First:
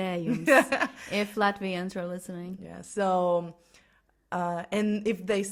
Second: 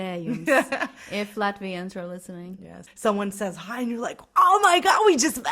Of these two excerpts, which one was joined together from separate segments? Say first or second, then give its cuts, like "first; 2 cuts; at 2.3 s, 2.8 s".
second; 1 cut; at 2.8 s